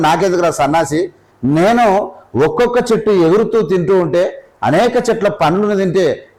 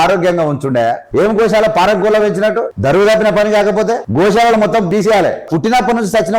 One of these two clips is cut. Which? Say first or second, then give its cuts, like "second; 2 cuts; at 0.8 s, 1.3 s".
second; 4 cuts; at 1.0 s, 2.7 s, 4.1 s, 5.0 s